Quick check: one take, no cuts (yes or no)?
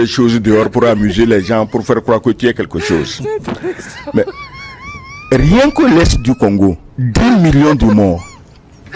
yes